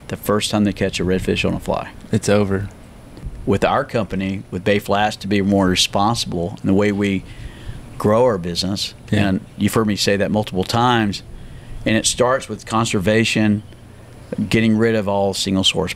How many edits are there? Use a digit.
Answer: 1